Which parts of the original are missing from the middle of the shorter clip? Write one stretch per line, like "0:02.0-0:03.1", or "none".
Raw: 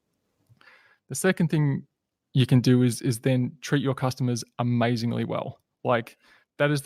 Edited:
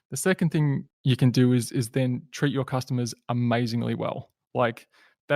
0:01.9-0:02.2